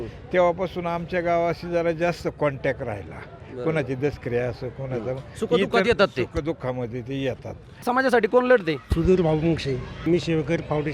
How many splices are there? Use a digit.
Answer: 2